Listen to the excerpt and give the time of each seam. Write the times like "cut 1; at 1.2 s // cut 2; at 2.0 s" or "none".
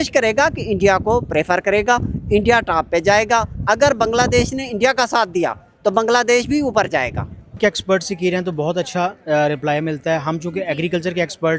cut 1; at 7.6 s

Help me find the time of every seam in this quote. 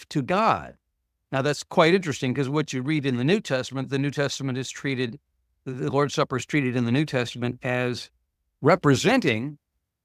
none

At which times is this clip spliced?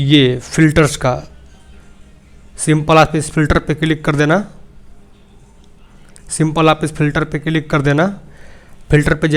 none

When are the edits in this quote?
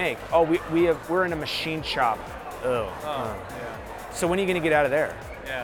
cut 1; at 2.2 s

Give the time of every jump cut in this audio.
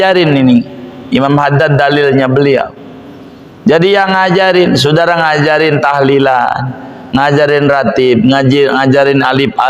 none

